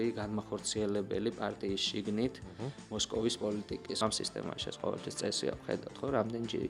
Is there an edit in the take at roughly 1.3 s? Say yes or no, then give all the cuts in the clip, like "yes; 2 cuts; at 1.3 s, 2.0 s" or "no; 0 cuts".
no; 1 cut; at 4.0 s